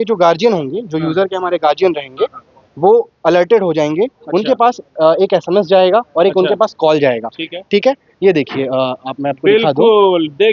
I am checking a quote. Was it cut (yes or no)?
no